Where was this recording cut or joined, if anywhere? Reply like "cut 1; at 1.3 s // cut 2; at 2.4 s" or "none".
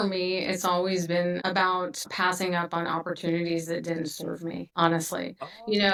none

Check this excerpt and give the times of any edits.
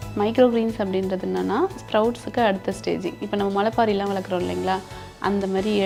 none

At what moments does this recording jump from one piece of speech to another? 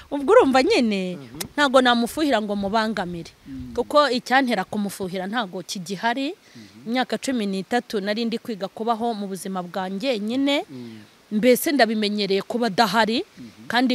none

